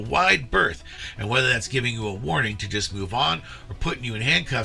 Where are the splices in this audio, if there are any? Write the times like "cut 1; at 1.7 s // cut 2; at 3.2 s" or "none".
cut 1; at 0.9 s

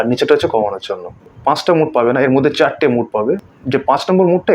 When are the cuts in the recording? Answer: cut 1; at 1.2 s // cut 2; at 3.5 s

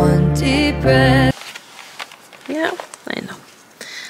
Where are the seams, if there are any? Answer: cut 1; at 1.3 s

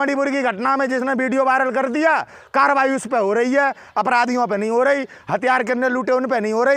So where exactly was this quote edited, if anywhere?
none

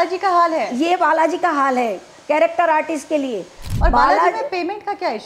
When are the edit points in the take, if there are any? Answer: cut 1; at 3.7 s

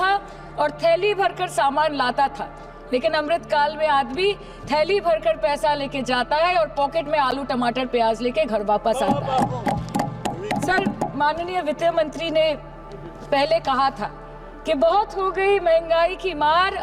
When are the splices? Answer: none

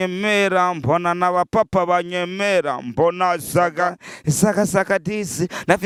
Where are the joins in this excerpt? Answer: none

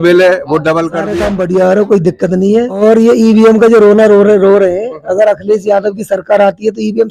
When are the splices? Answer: cut 1; at 1.1 s // cut 2; at 2.8 s

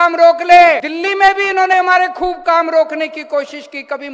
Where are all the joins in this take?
cut 1; at 0.9 s

